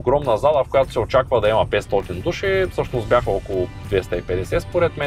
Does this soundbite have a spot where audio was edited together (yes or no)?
no